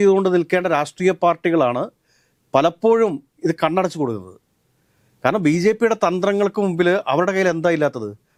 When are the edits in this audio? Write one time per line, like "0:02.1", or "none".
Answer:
none